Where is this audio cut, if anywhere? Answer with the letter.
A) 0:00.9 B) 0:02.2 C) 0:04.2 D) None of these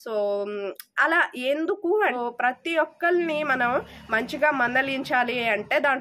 B